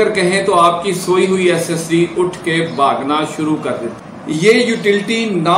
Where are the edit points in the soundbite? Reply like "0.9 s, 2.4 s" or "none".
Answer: 4.0 s